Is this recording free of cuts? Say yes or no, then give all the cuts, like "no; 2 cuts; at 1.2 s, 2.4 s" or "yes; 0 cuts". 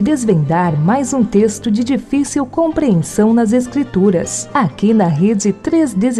yes; 0 cuts